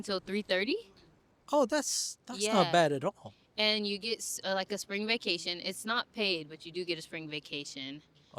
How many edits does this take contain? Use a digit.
0